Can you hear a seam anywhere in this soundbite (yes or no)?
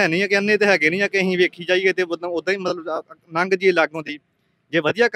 no